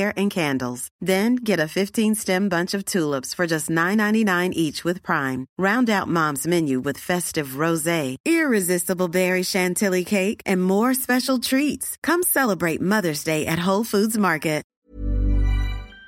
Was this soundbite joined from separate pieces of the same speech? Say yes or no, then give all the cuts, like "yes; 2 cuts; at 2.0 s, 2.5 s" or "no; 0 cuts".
yes; 1 cut; at 14.7 s